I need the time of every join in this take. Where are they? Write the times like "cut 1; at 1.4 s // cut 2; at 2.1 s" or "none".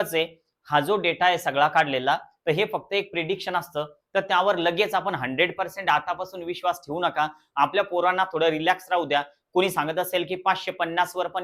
none